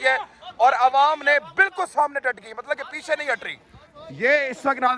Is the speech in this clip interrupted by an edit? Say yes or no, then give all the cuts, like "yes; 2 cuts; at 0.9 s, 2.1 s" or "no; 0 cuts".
no; 0 cuts